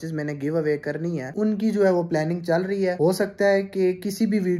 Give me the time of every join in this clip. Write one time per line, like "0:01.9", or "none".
none